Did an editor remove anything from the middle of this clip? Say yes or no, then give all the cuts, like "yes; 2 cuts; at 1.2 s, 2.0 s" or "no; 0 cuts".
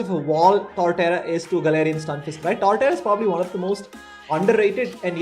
no; 0 cuts